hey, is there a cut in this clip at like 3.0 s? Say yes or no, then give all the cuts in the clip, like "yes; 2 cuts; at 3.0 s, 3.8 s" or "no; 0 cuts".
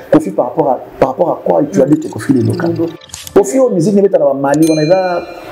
yes; 1 cut; at 3.0 s